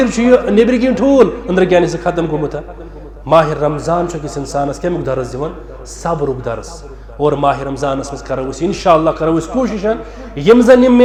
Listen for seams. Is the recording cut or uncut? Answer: uncut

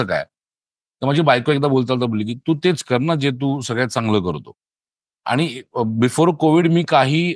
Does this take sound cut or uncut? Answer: uncut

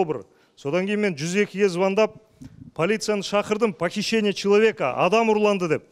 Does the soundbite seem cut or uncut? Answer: uncut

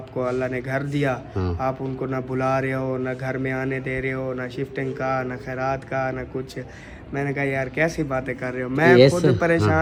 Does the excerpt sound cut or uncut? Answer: uncut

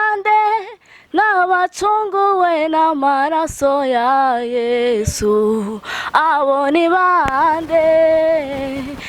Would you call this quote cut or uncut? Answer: uncut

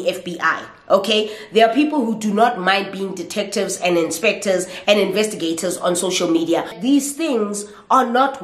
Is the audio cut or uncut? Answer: cut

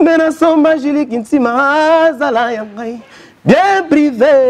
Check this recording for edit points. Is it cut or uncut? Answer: uncut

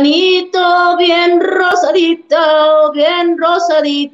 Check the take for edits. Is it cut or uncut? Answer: uncut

